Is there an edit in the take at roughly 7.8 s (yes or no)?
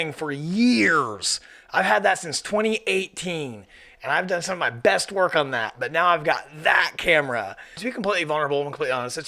yes